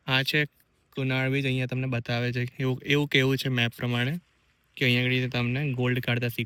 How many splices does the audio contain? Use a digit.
0